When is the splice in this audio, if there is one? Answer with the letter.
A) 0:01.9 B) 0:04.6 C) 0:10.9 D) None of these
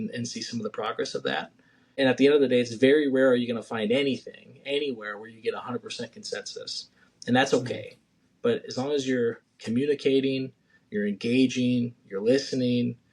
A